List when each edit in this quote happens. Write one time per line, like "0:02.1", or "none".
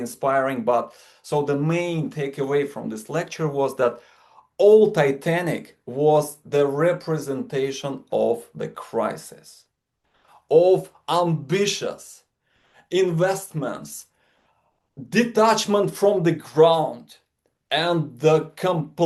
none